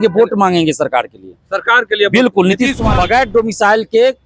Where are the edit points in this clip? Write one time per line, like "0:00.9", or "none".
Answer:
0:02.8